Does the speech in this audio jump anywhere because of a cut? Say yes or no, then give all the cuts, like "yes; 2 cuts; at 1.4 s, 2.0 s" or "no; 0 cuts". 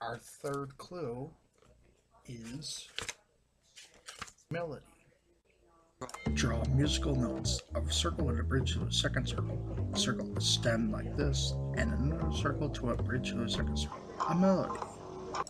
yes; 1 cut; at 14.2 s